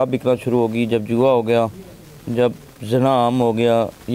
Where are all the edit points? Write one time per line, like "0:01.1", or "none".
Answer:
none